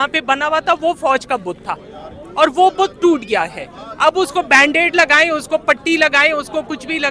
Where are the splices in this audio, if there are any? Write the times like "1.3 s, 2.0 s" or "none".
none